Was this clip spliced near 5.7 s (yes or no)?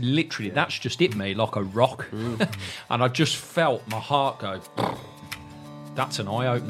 yes